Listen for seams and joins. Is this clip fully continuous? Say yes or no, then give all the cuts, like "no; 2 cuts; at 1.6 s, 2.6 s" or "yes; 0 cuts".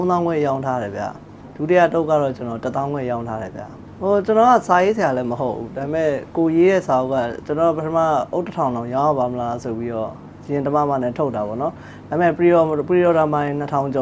yes; 0 cuts